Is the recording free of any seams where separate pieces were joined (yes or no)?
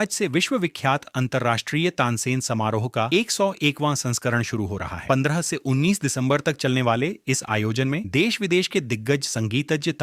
yes